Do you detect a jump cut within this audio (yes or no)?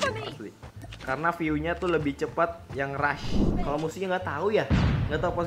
yes